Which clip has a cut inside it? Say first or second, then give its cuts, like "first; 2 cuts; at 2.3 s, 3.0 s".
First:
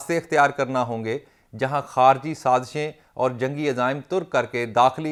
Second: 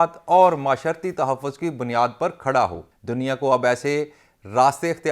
second; 1 cut; at 2.9 s